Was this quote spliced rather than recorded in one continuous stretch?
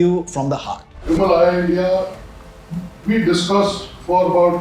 yes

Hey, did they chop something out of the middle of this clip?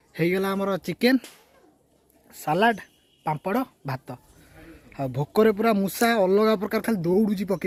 no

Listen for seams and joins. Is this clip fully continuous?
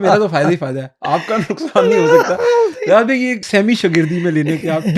no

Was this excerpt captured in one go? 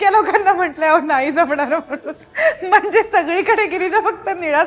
yes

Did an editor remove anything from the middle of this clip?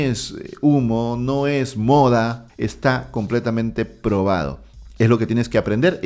yes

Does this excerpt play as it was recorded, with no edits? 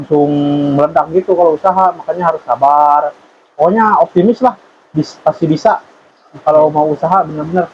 yes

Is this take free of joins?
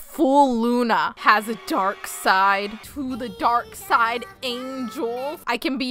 yes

